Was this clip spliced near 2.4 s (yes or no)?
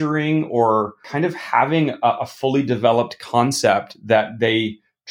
no